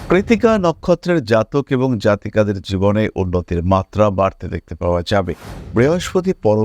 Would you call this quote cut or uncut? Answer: cut